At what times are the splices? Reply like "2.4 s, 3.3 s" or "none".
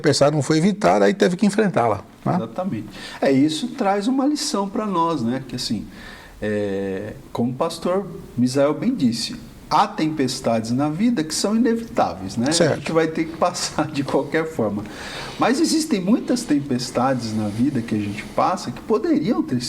7.2 s